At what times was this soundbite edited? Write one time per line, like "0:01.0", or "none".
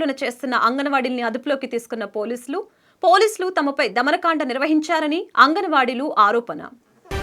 none